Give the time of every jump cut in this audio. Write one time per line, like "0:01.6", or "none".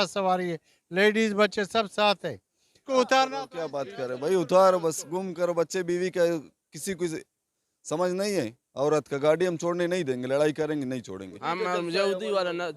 0:02.8
0:11.4